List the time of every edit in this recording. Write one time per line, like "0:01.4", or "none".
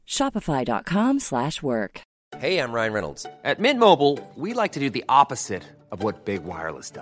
0:02.0